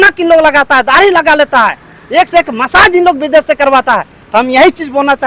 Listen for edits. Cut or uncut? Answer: uncut